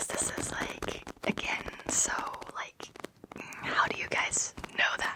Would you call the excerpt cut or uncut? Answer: uncut